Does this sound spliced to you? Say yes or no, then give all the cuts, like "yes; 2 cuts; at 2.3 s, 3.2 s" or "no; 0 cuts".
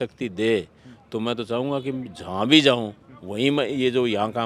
no; 0 cuts